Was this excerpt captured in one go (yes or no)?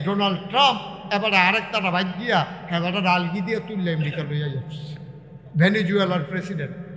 yes